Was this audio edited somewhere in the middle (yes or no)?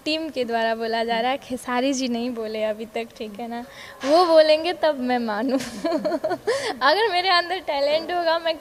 no